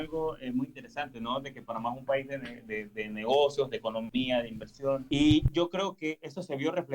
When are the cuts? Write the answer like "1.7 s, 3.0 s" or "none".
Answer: 4.1 s, 5.0 s

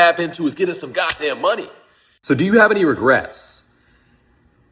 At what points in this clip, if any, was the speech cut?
2.1 s

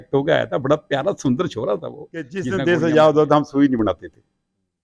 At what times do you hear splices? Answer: 2.4 s

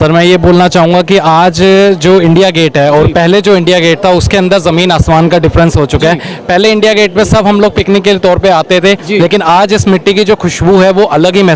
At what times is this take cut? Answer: none

